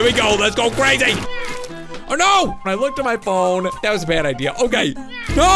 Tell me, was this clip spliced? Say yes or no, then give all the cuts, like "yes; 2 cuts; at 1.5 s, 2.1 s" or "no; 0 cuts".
yes; 3 cuts; at 1.3 s, 2.7 s, 3.8 s